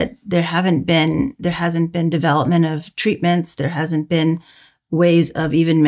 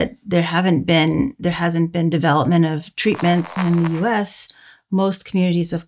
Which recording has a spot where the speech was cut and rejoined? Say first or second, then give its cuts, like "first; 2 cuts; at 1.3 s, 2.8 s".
second; 1 cut; at 3.5 s